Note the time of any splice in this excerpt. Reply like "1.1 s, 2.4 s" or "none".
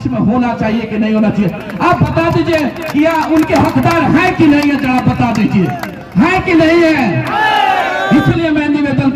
none